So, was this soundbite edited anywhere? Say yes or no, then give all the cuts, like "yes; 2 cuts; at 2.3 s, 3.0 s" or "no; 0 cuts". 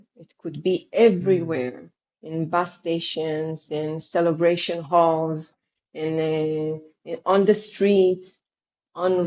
no; 0 cuts